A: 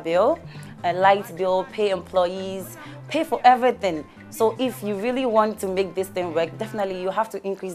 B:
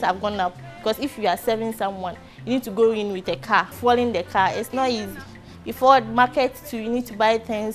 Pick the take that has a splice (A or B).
B